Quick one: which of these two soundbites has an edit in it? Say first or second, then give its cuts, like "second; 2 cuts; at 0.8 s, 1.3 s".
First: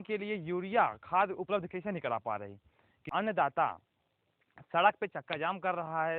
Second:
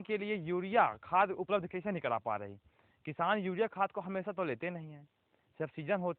first; 1 cut; at 3.1 s